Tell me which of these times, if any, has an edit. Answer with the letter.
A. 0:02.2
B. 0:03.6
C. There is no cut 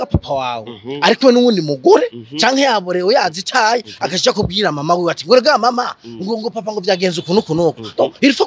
C